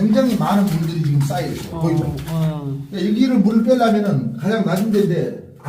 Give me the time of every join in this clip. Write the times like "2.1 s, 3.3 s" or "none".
none